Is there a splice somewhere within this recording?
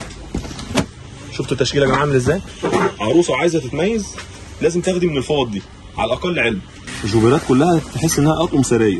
yes; 2 cuts; at 2.5 s, 6.8 s

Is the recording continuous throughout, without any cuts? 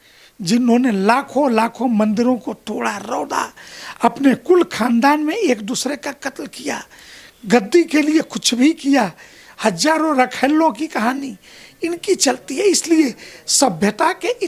yes; 0 cuts

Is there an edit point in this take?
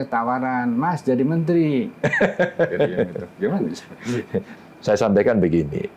yes; 1 cut; at 4.5 s

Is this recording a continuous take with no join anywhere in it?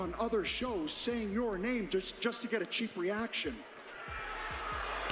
yes; 0 cuts

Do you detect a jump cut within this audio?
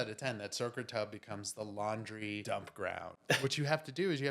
yes; 2 cuts; at 2.4 s, 3.4 s

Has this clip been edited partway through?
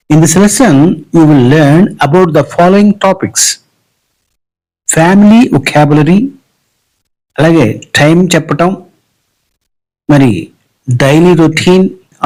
no; 0 cuts

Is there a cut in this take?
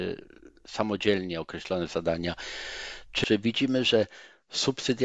yes; 1 cut; at 3.2 s

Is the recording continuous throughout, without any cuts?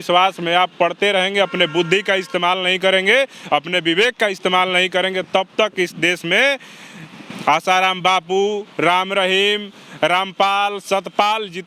yes; 0 cuts

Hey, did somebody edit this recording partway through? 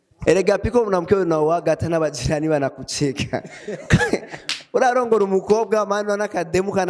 no; 0 cuts

